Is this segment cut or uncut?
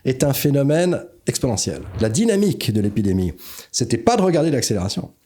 cut